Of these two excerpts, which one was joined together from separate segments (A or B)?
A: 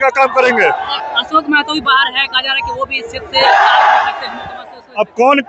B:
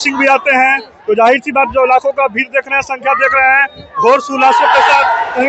A